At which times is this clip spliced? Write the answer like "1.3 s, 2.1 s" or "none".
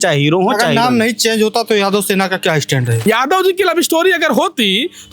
3.0 s